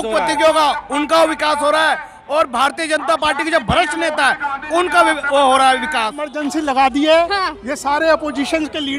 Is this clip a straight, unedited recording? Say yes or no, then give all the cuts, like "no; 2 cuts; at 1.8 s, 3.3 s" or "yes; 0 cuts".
no; 1 cut; at 6.2 s